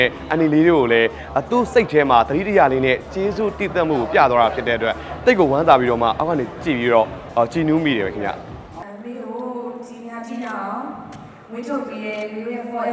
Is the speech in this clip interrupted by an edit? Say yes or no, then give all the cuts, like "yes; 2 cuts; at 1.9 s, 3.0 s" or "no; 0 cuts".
no; 0 cuts